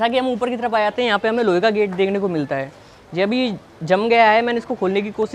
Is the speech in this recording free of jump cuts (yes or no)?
yes